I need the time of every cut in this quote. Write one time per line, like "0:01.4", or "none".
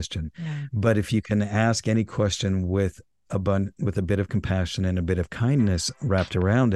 none